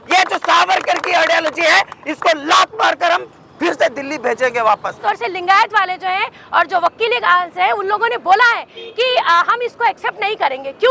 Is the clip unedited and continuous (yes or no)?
no